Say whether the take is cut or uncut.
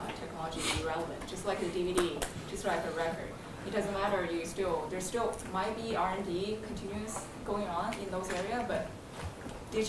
cut